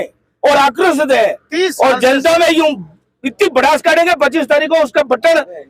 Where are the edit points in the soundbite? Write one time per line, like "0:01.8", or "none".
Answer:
none